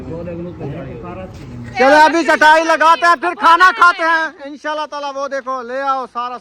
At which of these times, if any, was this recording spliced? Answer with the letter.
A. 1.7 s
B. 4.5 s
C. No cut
A